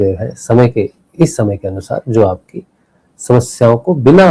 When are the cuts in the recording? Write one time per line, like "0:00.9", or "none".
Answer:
none